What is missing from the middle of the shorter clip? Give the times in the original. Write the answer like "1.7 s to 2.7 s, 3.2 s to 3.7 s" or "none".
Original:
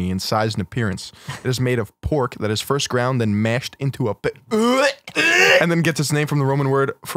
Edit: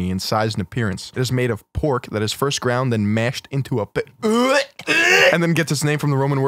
1.0 s to 1.3 s

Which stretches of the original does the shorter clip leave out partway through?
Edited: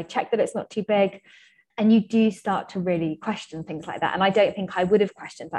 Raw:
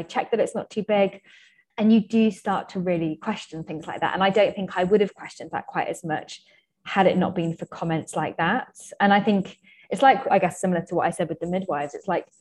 none

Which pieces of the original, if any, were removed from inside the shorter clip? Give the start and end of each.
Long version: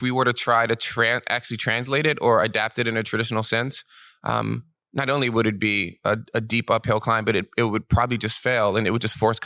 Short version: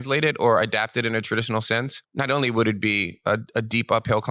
3.8 s to 4.8 s

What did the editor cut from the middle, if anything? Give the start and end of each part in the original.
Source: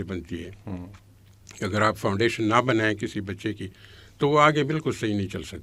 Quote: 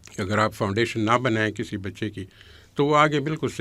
none

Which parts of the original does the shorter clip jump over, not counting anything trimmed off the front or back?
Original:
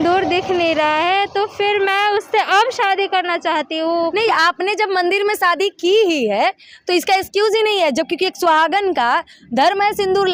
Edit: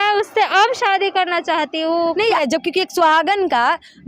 4.4 s to 7.8 s

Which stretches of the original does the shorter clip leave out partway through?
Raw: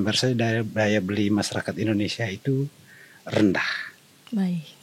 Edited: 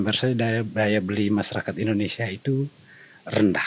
none

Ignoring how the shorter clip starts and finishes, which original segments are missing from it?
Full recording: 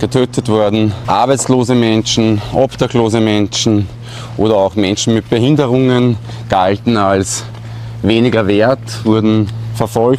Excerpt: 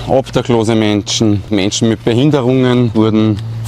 3.9 s to 4.7 s, 6.2 s to 9.0 s

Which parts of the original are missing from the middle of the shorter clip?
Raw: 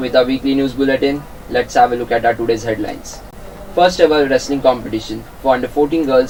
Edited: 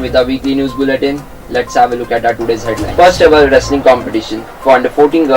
2.8 s to 3.6 s

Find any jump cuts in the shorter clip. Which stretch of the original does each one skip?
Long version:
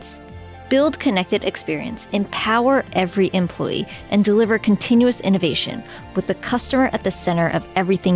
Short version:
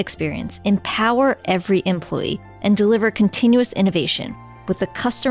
none

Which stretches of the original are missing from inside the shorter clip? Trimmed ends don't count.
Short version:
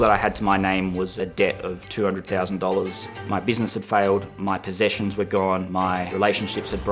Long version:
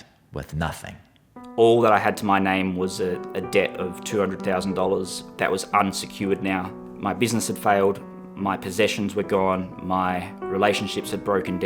3.0 s to 3.3 s, 5.2 s to 6.8 s, 8.1 s to 8.3 s, 9.8 s to 10.2 s

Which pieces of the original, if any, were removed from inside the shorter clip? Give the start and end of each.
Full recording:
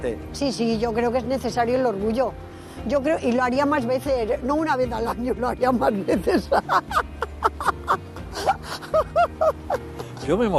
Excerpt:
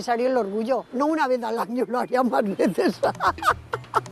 2.4 s to 4.4 s

